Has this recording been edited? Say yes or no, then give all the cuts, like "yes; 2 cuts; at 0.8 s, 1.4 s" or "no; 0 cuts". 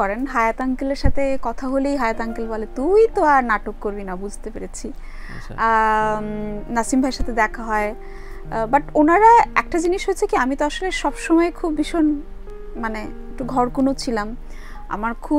no; 0 cuts